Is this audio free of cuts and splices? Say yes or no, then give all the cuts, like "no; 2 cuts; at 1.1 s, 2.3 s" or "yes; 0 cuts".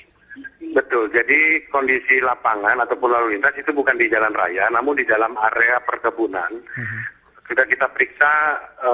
no; 1 cut; at 1.5 s